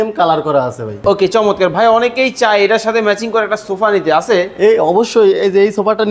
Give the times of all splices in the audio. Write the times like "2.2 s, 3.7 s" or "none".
1.0 s